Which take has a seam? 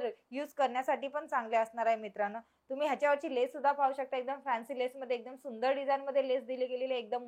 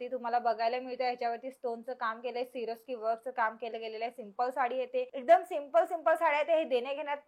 second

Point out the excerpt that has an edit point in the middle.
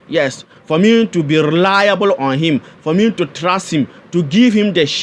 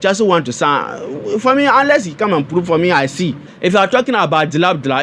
second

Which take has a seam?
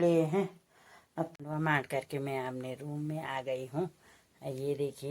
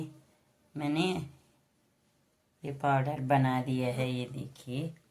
first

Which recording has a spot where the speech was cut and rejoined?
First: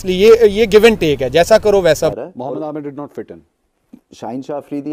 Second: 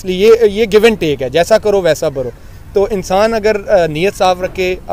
first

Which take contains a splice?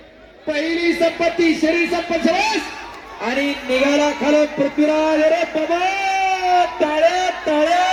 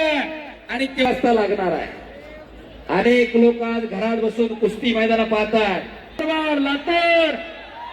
second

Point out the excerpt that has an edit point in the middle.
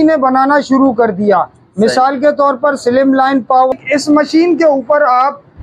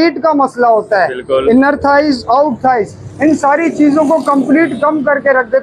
first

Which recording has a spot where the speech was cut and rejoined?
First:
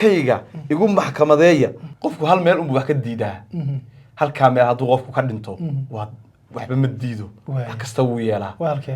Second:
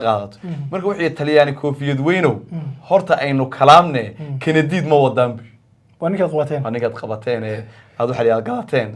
first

